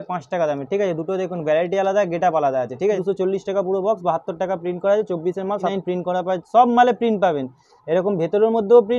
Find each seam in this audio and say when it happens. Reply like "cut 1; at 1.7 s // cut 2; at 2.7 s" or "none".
cut 1; at 3.0 s // cut 2; at 5.7 s